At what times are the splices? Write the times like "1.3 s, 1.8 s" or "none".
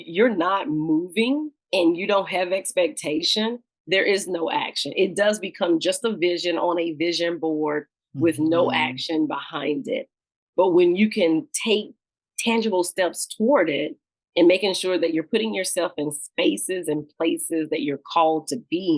1.6 s